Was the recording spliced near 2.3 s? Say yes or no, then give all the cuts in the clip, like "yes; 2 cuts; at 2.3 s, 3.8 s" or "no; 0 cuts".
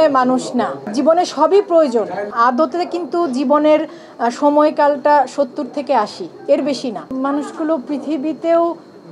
yes; 3 cuts; at 0.9 s, 2.3 s, 7.1 s